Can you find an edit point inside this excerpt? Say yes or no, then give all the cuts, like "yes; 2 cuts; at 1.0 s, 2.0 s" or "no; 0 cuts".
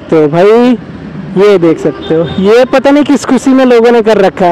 no; 0 cuts